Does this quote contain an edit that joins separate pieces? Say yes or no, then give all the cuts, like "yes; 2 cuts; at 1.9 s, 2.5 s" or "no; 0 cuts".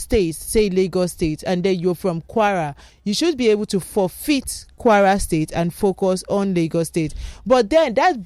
no; 0 cuts